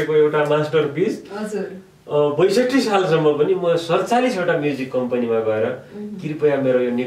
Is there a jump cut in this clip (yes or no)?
no